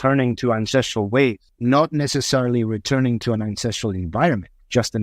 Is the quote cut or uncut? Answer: cut